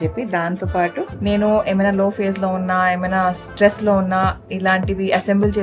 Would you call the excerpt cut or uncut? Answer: cut